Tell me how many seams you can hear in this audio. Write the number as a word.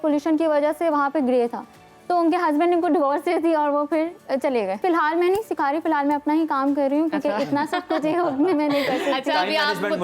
one